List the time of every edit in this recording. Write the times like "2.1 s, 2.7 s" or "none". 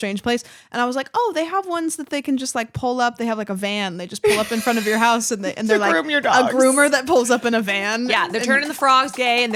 none

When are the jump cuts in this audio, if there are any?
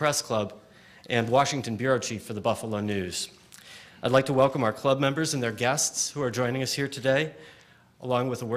none

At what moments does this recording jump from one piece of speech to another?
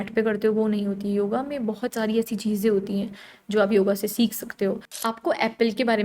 4.9 s

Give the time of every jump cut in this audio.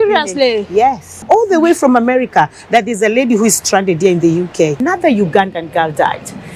1.3 s, 4.8 s

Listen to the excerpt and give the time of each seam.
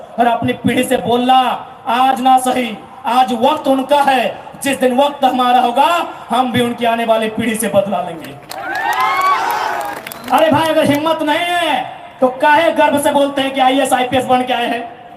10.0 s

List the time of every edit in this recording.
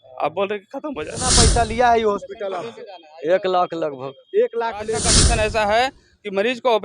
1.2 s, 5.2 s

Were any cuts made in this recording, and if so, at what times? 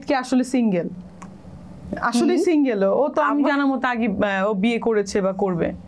none

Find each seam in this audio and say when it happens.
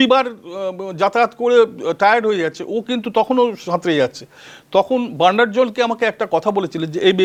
none

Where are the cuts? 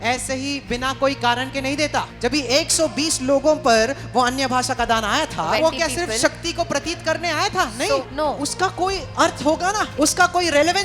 2.1 s, 5.6 s, 8.1 s, 9.9 s

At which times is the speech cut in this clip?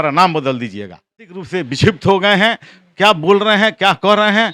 1.4 s

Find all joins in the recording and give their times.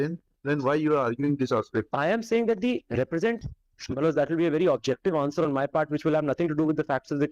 3.4 s

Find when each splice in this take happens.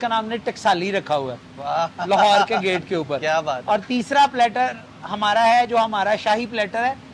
none

